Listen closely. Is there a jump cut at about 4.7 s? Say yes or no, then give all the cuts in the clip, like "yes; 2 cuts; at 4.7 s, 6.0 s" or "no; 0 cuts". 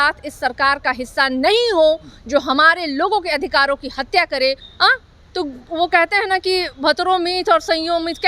yes; 1 cut; at 4.7 s